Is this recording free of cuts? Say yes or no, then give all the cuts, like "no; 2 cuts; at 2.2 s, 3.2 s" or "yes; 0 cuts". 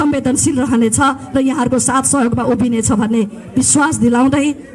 yes; 0 cuts